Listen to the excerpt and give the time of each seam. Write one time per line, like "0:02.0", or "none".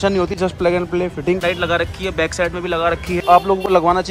0:01.4
0:03.2